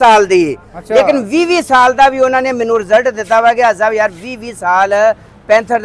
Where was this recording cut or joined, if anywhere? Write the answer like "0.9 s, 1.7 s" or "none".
none